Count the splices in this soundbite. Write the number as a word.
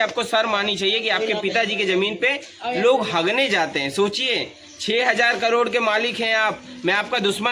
zero